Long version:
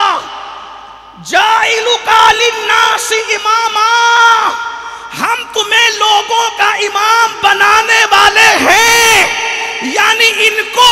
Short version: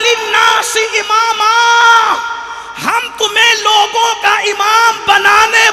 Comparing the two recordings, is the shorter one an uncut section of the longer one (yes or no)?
yes